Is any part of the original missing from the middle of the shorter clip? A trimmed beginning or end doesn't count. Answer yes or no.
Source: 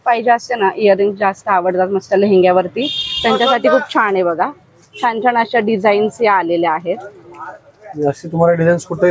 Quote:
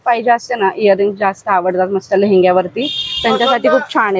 no